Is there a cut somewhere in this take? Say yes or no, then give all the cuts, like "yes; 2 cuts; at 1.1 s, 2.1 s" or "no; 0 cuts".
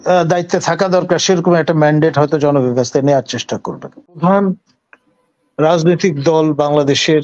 yes; 1 cut; at 4.2 s